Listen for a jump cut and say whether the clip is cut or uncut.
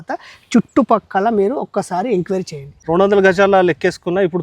cut